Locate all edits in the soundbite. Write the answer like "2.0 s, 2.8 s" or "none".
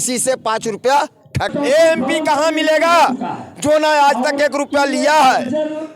1.5 s